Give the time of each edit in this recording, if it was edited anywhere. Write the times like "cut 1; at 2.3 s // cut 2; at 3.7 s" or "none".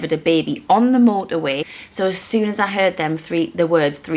cut 1; at 1.7 s